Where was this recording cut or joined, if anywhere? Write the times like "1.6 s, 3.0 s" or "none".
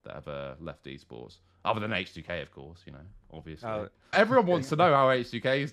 4.1 s

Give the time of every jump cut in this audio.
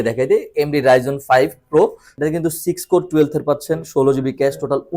2.0 s

